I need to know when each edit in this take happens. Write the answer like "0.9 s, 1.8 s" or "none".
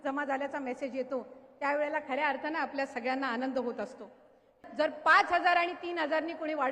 4.5 s